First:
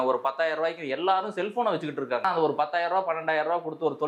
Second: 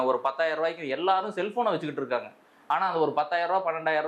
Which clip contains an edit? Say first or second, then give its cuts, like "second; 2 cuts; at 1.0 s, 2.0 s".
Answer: first; 1 cut; at 2.2 s